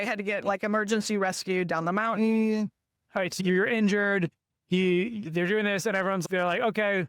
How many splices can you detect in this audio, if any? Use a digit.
1